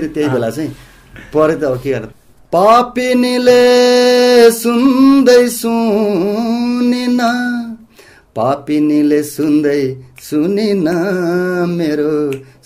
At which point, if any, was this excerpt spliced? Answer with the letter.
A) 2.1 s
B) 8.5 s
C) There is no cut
A